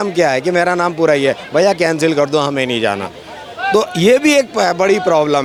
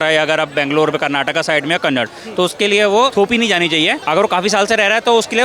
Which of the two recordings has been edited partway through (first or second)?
second